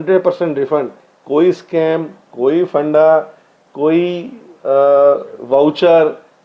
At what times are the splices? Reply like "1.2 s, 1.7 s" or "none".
1.1 s